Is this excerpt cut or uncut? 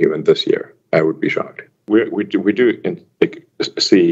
uncut